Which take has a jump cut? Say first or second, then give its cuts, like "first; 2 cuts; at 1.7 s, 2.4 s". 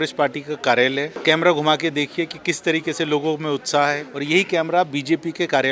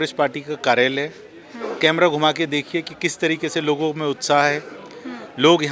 first; 2 cuts; at 1.1 s, 4.1 s